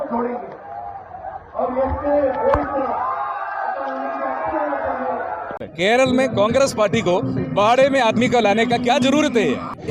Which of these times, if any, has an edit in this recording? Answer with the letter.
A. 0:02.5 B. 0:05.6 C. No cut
B